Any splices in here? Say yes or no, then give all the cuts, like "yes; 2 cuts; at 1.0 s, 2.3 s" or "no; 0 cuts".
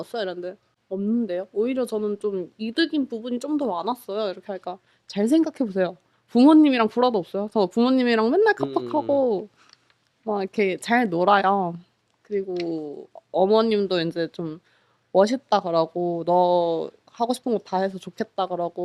no; 0 cuts